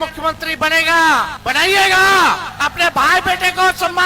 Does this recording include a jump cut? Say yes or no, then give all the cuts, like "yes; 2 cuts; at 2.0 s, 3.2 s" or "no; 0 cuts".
yes; 2 cuts; at 1.4 s, 2.5 s